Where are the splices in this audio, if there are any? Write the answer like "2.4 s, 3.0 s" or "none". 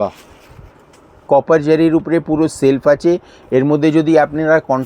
1.2 s